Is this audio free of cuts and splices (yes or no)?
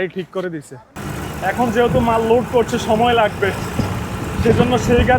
no